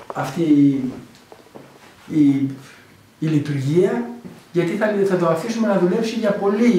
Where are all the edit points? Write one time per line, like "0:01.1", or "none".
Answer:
0:02.2